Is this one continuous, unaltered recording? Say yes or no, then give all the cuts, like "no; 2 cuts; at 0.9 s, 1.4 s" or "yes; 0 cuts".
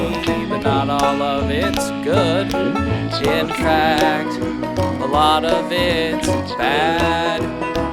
yes; 0 cuts